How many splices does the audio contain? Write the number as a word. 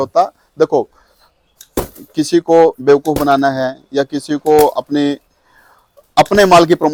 zero